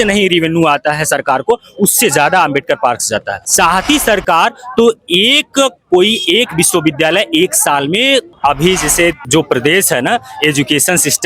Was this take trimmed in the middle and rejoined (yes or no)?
yes